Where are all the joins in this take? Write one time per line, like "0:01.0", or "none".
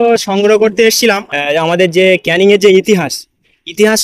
0:01.3